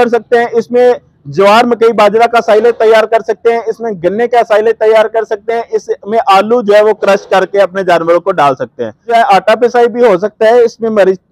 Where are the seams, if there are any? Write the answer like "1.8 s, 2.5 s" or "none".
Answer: 9.1 s